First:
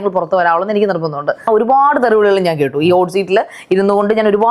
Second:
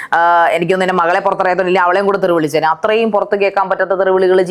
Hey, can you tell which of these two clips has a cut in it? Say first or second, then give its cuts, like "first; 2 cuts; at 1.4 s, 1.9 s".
first; 1 cut; at 1.5 s